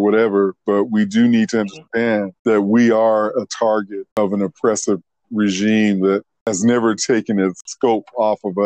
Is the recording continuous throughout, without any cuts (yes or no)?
no